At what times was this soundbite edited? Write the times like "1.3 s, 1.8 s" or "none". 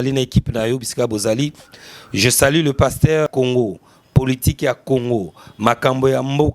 3.3 s